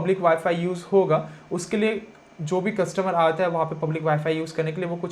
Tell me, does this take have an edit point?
no; 0 cuts

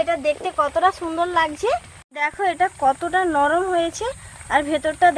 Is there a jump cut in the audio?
yes; 1 cut; at 2.0 s

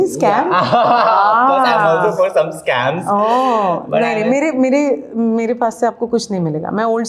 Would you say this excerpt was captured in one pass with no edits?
yes; 0 cuts

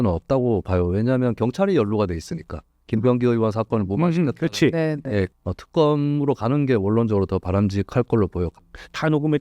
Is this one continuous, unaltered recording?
no; 2 cuts; at 5.2 s, 8.5 s

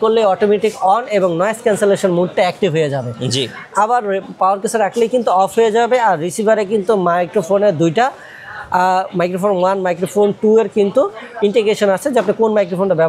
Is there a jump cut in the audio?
no; 0 cuts

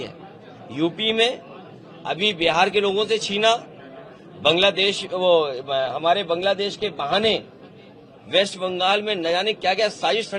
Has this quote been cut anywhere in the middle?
no; 0 cuts

